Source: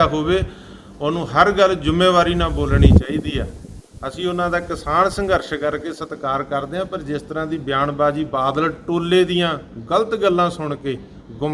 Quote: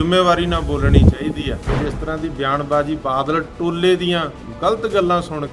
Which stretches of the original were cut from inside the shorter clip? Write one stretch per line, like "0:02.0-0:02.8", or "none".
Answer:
0:03.6-0:07.0